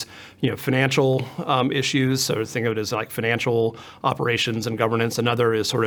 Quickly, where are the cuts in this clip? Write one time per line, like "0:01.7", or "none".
none